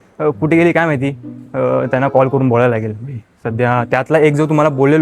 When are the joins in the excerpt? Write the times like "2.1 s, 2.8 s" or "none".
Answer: none